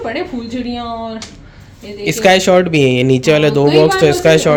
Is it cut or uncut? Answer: uncut